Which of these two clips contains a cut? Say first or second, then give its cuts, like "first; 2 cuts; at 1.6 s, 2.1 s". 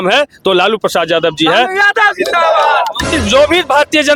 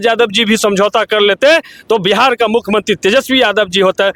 first; 1 cut; at 3.1 s